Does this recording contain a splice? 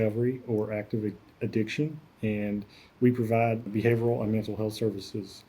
yes; 1 cut; at 3.7 s

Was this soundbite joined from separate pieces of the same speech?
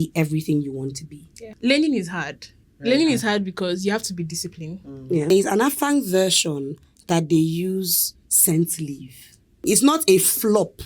yes; 3 cuts; at 1.5 s, 5.3 s, 9.7 s

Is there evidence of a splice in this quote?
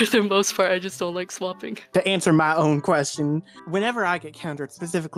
no; 0 cuts

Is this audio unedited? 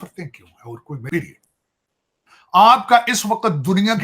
no; 1 cut; at 1.0 s

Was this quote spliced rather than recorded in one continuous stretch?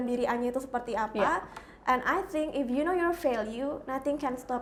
no; 0 cuts

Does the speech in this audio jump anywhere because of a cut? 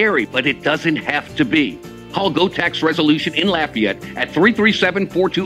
no; 0 cuts

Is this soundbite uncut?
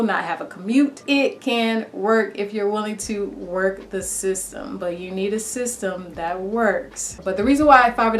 no; 1 cut; at 7.2 s

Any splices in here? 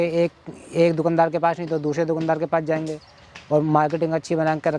no; 0 cuts

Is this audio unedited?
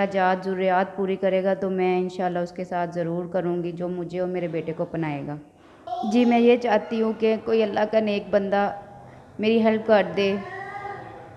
no; 1 cut; at 5.8 s

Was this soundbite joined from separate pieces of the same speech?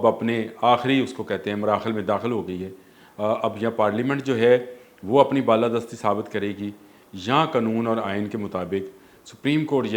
no; 0 cuts

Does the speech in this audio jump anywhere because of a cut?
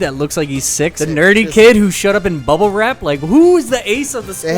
yes; 1 cut; at 0.9 s

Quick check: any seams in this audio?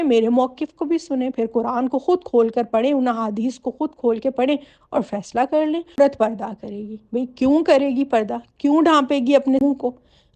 yes; 1 cut; at 6.0 s

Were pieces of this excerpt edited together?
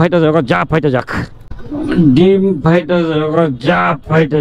no; 0 cuts

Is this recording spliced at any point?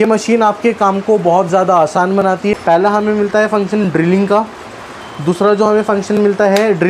yes; 1 cut; at 2.5 s

